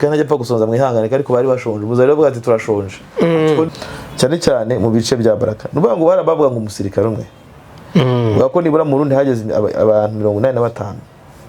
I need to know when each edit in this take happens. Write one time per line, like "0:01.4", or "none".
0:03.7

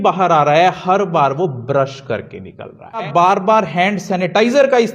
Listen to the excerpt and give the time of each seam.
0:03.1

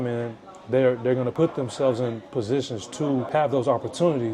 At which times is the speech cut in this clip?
0:01.3
0:03.3

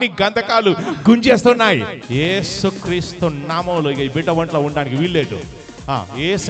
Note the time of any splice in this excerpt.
0:02.0

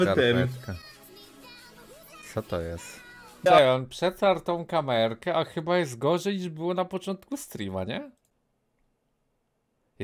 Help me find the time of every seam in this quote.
0:03.4

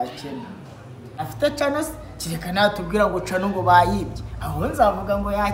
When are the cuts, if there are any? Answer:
0:01.2

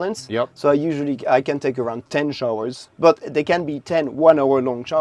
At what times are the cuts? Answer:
0:02.8

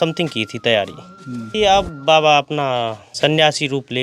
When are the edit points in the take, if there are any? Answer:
0:01.5
0:03.0

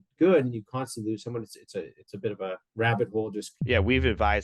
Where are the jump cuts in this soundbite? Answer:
0:03.5

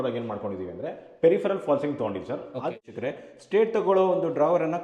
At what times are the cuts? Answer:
0:02.7

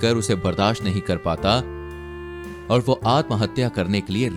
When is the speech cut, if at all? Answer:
none

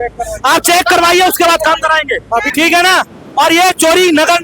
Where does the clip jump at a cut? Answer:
0:02.5

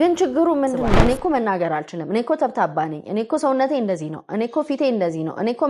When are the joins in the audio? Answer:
0:01.0

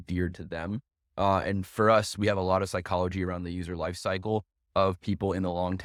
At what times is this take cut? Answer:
none

